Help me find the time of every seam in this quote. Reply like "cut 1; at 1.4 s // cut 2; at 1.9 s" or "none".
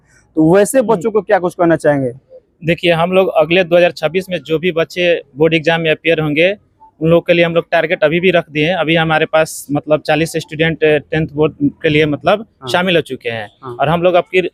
none